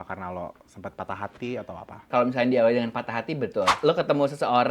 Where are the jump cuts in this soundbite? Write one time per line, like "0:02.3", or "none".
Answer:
0:02.1
0:03.8